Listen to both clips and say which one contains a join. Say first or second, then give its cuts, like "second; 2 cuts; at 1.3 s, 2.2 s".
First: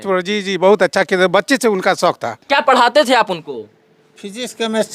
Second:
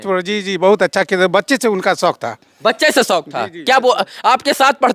first; 1 cut; at 2.4 s